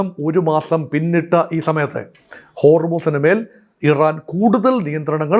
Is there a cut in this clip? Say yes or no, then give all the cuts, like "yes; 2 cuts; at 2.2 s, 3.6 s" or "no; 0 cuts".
no; 0 cuts